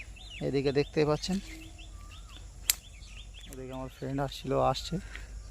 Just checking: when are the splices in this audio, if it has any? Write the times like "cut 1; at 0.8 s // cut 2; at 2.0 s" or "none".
cut 1; at 3.6 s

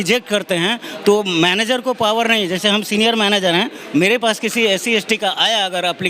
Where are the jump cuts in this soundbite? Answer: none

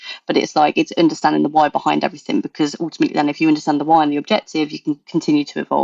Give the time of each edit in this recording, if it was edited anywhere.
none

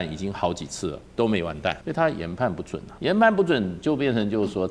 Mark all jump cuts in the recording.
cut 1; at 1.8 s // cut 2; at 2.8 s

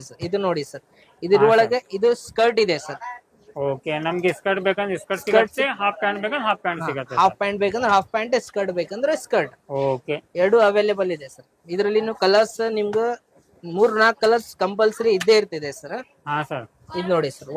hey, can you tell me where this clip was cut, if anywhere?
none

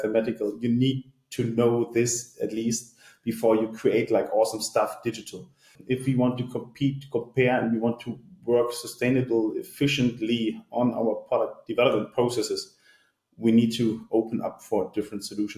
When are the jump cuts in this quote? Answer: cut 1; at 5.7 s

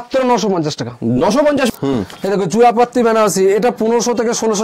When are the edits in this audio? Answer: cut 1; at 1.7 s

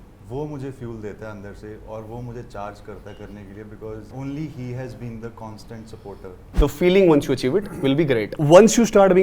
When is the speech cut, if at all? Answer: cut 1; at 4.1 s // cut 2; at 6.4 s // cut 3; at 8.3 s

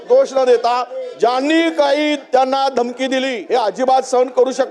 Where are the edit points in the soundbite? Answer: cut 1; at 3.4 s

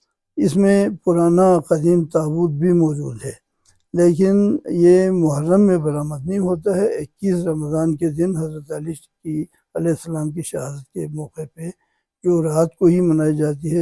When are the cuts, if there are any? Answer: none

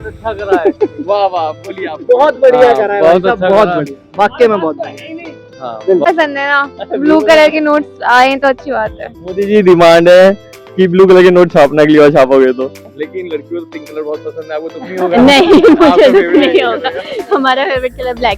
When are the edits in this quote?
cut 1; at 6.1 s // cut 2; at 13.0 s

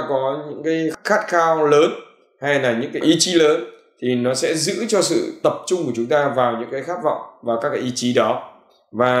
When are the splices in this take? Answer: cut 1; at 0.9 s // cut 2; at 3.0 s

